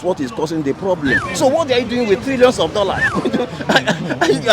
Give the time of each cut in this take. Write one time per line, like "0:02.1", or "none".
0:01.3
0:03.1